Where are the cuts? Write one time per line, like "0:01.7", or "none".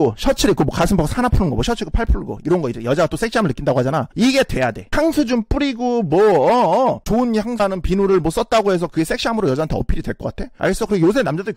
0:04.9
0:10.4